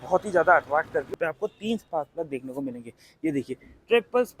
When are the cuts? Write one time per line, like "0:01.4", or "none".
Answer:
0:01.1